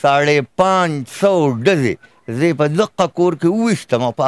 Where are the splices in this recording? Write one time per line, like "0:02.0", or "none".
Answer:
none